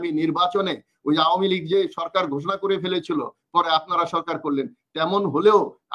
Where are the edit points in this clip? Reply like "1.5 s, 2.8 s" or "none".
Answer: none